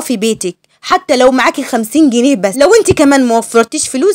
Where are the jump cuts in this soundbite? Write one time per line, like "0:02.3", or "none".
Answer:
0:02.5